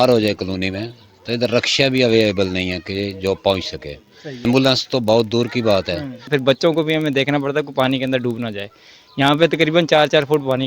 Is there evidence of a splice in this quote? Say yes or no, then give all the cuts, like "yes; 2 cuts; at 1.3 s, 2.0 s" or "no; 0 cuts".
yes; 2 cuts; at 4.4 s, 6.3 s